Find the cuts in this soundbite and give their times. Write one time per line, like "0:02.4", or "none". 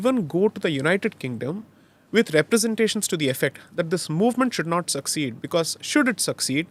none